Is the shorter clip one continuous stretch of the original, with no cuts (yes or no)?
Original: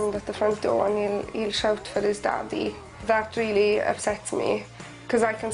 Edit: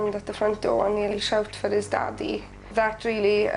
no